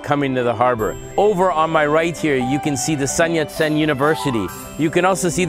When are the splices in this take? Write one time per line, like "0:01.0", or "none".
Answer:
0:01.0
0:04.6